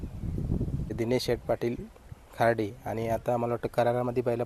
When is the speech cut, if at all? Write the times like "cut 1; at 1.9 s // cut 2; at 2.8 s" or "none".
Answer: cut 1; at 0.9 s